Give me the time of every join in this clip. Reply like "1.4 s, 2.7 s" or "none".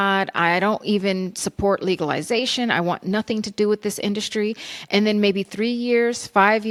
none